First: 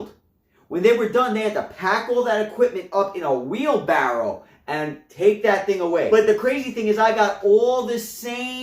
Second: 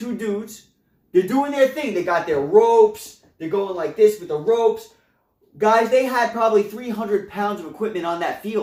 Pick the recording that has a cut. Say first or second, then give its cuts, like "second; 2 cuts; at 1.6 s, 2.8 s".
first; 1 cut; at 6.1 s